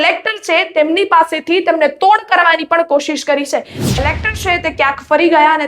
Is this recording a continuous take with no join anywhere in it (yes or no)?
no